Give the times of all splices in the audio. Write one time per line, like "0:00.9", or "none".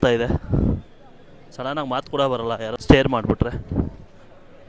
0:02.8